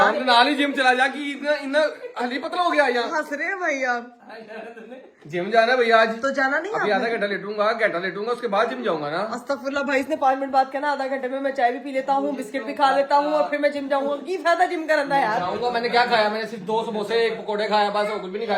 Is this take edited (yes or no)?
no